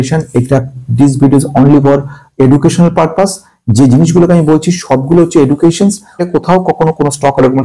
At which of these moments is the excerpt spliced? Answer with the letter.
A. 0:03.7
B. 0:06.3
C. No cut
B